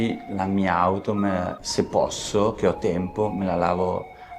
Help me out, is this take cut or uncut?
uncut